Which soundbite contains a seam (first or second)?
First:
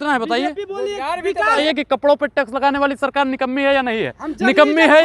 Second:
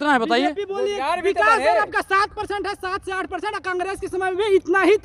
first